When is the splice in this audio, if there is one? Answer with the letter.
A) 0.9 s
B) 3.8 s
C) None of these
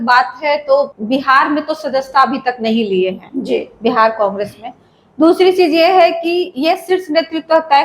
A